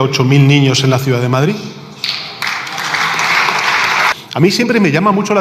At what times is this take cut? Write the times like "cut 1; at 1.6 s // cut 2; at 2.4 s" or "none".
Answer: cut 1; at 4.1 s